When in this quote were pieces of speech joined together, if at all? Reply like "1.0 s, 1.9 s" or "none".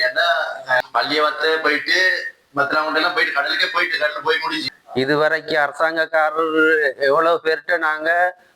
0.8 s, 4.7 s